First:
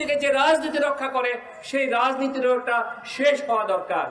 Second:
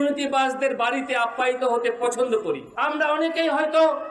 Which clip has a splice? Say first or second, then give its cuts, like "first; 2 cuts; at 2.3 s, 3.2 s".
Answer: second; 1 cut; at 2.7 s